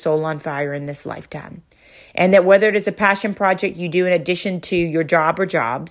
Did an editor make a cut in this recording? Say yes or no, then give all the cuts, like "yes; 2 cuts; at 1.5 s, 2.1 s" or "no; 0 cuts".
no; 0 cuts